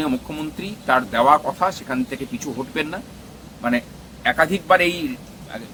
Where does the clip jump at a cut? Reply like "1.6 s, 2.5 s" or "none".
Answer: none